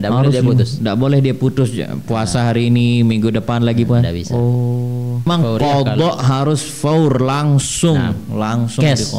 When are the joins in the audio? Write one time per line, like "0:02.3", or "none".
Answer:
0:05.3